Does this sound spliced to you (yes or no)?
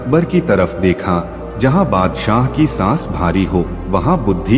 no